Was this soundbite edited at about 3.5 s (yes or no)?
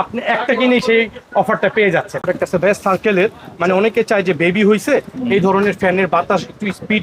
no